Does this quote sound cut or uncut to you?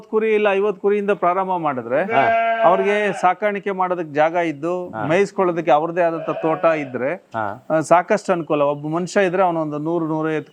uncut